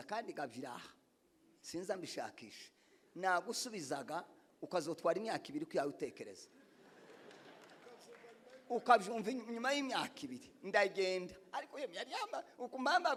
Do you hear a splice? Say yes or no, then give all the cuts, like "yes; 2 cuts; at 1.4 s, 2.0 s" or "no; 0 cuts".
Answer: no; 0 cuts